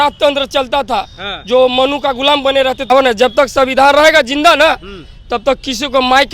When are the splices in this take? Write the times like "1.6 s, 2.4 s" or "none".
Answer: 2.9 s